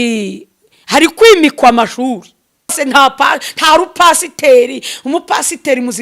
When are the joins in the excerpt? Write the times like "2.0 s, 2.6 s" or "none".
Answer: 2.7 s